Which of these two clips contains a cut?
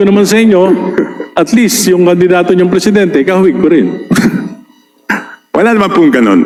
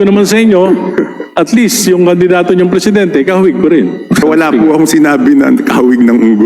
second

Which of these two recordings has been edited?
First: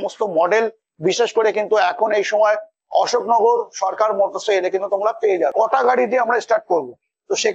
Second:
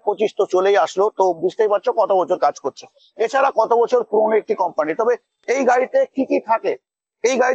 first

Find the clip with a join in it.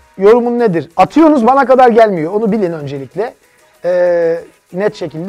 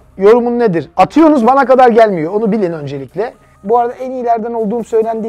second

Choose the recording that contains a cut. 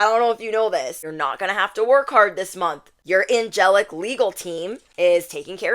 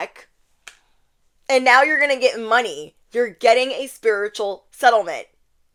first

